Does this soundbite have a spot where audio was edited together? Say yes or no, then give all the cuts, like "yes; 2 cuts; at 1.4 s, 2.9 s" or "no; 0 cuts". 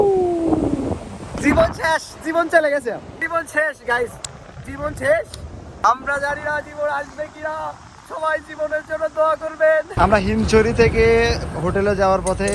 yes; 3 cuts; at 1.4 s, 3.1 s, 9.9 s